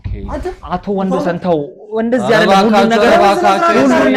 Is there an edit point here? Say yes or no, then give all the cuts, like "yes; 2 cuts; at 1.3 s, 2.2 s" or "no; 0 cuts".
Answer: no; 0 cuts